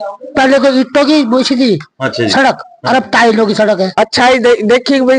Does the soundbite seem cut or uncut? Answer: cut